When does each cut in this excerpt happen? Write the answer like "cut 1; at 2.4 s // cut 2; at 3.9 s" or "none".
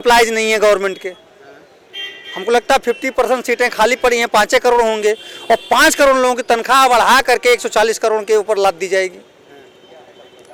none

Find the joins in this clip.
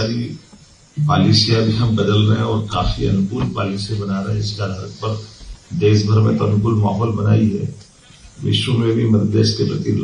none

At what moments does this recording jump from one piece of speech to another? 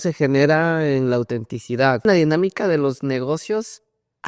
cut 1; at 2.0 s

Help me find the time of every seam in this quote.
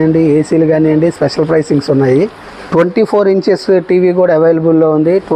cut 1; at 2.4 s

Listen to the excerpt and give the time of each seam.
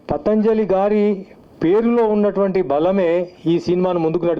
none

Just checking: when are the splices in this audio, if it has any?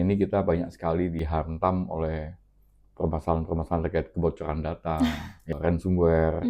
cut 1; at 1.2 s // cut 2; at 5.5 s

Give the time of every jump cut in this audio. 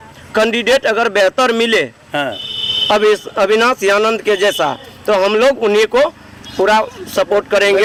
none

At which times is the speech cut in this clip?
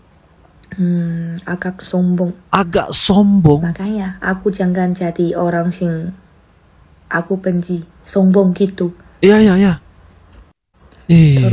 none

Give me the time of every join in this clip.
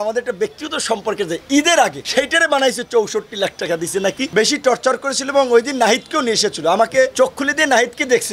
cut 1; at 4.3 s

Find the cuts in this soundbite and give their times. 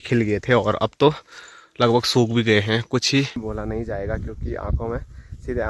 cut 1; at 3.4 s

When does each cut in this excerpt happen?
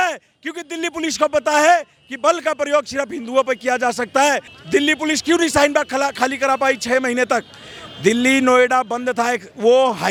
none

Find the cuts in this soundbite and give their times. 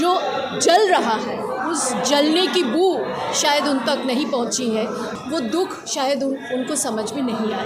cut 1; at 5.1 s

